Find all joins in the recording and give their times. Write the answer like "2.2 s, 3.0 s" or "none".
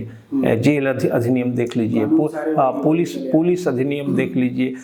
none